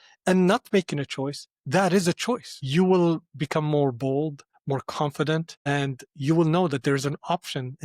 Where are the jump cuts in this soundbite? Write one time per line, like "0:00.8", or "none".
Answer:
0:02.6
0:04.5
0:05.6